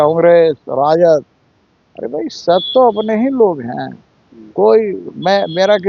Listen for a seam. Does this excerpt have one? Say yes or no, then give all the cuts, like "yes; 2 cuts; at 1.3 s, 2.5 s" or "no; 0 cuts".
no; 0 cuts